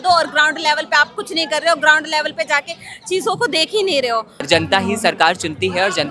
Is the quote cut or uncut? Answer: cut